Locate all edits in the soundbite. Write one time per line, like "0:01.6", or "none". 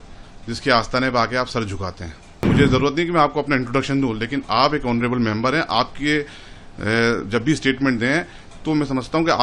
0:02.5

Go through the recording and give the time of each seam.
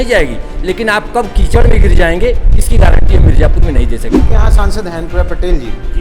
0:04.2

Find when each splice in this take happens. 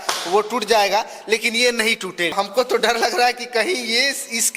0:02.3

